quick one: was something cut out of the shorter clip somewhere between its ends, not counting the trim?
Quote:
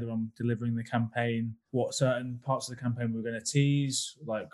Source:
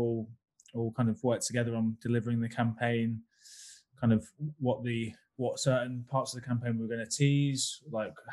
yes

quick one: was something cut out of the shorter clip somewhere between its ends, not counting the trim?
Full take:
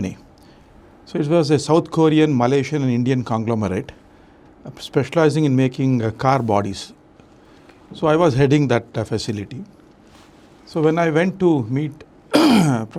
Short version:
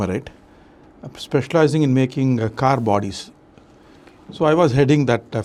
no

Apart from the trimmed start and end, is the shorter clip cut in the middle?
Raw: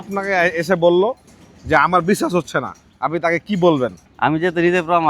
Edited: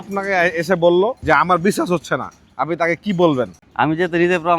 yes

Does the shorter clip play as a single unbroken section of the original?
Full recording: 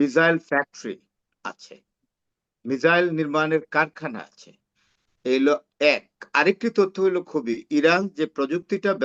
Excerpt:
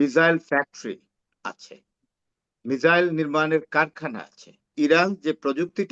no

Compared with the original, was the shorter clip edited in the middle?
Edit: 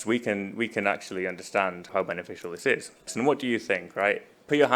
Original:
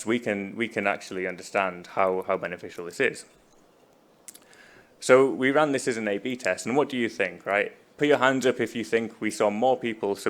yes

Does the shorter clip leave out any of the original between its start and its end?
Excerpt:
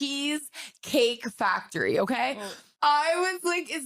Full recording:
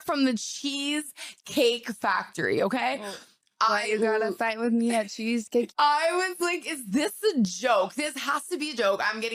yes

